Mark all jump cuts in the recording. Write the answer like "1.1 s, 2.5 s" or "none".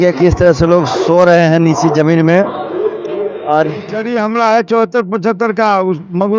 3.9 s